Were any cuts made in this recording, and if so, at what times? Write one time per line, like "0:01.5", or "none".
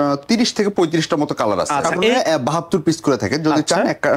0:02.2